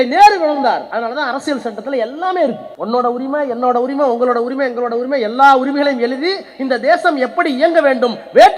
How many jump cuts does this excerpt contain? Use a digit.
2